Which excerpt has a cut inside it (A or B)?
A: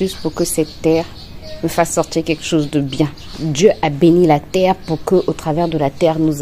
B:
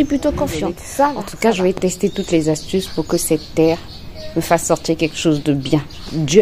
B